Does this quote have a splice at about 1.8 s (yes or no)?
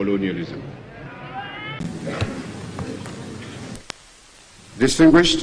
yes